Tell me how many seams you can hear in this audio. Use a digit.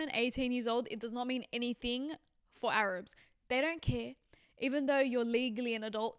0